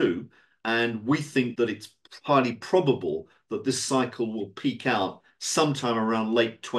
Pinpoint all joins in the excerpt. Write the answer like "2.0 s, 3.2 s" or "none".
1.5 s